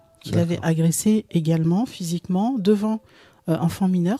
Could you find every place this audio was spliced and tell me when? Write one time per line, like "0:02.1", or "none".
none